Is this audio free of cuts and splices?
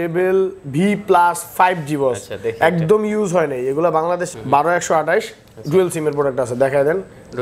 no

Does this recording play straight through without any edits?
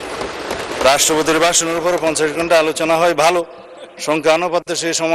yes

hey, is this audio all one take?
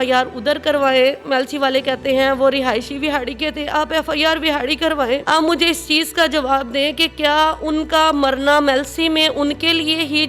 no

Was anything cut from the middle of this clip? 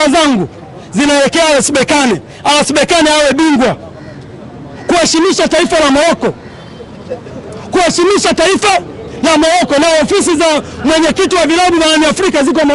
no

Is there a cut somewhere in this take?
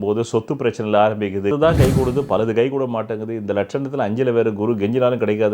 yes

